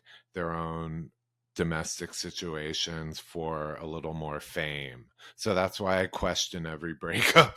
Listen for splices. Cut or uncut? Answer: uncut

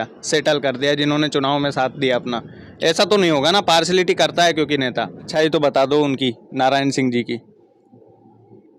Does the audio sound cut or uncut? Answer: cut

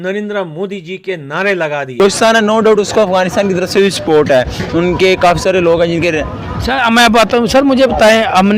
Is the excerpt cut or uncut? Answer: cut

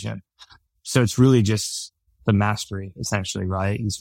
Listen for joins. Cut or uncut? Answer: uncut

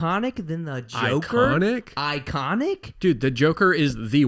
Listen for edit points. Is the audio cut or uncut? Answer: uncut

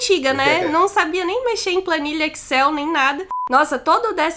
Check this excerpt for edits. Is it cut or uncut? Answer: cut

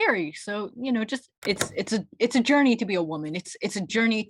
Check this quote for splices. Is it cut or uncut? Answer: cut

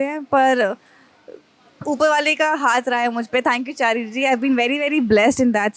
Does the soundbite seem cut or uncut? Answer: uncut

